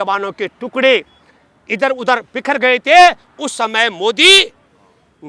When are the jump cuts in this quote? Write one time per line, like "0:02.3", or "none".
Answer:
none